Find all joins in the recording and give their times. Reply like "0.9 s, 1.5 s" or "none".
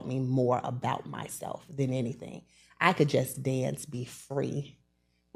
none